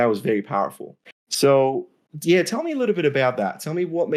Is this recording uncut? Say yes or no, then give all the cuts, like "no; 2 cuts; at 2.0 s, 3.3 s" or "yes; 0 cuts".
yes; 0 cuts